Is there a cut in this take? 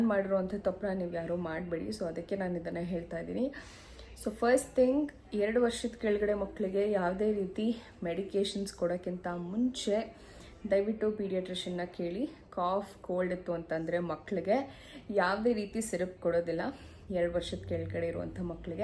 no; 0 cuts

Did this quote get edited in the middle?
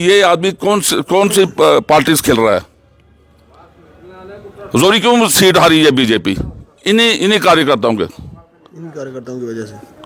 no; 0 cuts

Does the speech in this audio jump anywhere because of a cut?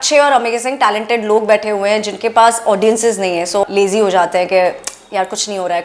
yes; 1 cut; at 3.6 s

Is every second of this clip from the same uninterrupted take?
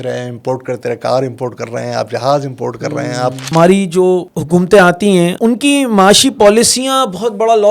no; 3 cuts; at 3.5 s, 4.3 s, 5.3 s

